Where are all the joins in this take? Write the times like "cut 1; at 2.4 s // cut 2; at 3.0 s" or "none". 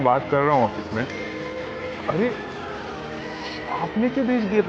cut 1; at 3.0 s